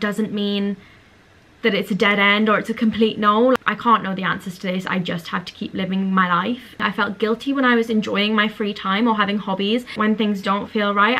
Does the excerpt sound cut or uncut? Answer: cut